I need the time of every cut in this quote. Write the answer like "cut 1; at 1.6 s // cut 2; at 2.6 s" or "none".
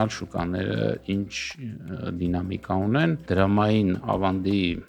cut 1; at 3.2 s

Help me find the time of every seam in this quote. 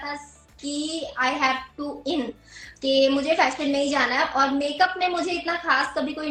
none

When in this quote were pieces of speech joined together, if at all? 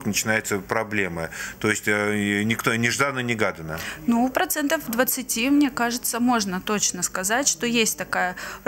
none

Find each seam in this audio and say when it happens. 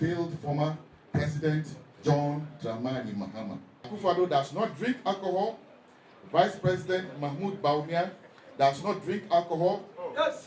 cut 1; at 3.9 s

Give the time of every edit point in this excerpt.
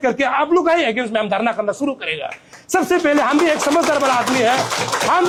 none

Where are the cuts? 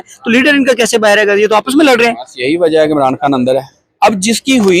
cut 1; at 3.8 s

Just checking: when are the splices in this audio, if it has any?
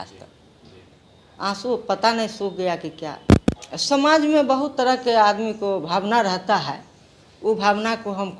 cut 1; at 3.7 s

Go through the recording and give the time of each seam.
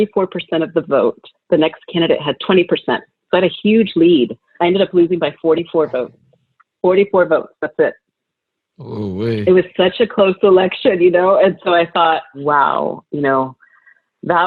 cut 1; at 1.3 s // cut 2; at 2.4 s // cut 3; at 4.5 s // cut 4; at 12.3 s

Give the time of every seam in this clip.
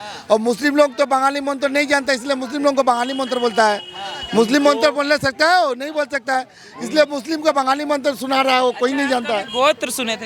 none

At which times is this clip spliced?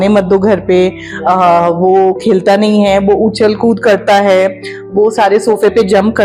none

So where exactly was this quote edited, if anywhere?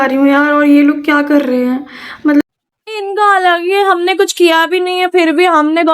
cut 1; at 2.4 s

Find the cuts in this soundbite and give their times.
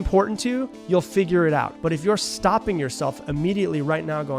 cut 1; at 1.7 s

